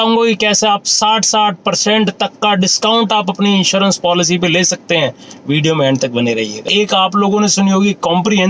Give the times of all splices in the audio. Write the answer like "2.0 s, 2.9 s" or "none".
6.7 s